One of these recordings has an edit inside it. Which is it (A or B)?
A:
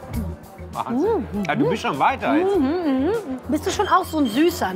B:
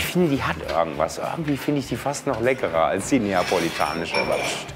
A